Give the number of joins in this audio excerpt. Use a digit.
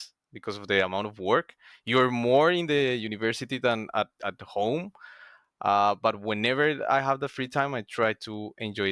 0